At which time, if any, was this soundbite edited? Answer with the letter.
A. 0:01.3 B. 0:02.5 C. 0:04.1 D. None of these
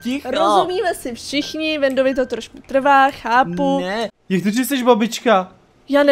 C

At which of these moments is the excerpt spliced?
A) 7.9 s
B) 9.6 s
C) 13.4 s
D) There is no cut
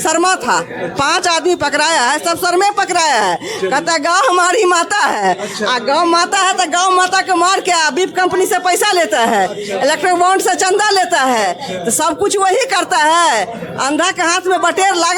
D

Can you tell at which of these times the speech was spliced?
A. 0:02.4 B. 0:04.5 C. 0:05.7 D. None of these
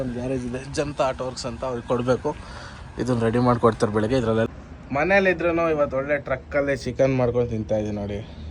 B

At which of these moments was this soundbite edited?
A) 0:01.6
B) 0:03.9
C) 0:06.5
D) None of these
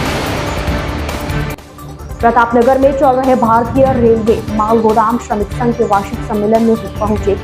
A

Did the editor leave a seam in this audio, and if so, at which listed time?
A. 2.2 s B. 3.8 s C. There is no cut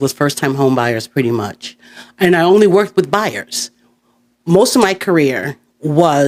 C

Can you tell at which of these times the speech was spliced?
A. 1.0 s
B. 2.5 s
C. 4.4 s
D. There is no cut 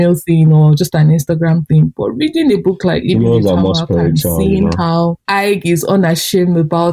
D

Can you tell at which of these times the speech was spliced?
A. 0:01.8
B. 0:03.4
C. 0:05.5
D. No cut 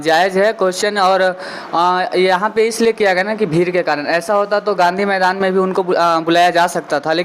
D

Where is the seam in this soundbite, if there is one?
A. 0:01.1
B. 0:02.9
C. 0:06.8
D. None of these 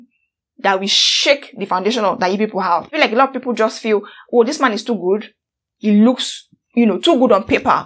B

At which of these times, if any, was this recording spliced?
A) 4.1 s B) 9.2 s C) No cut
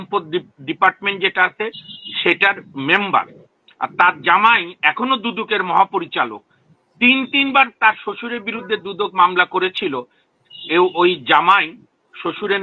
C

